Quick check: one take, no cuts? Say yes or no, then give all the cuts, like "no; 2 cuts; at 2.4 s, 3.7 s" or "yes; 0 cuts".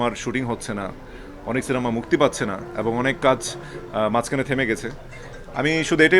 yes; 0 cuts